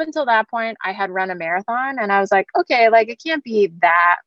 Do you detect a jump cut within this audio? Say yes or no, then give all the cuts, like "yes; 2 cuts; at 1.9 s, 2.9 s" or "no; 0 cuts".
no; 0 cuts